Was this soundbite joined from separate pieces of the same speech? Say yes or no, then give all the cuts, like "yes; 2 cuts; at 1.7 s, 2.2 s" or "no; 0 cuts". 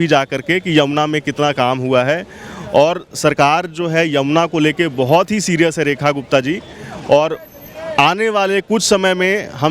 no; 0 cuts